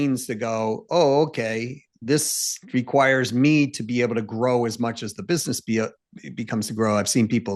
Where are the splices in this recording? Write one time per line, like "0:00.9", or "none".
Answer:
none